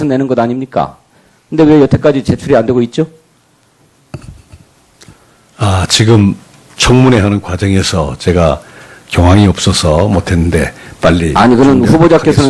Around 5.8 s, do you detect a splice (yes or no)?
no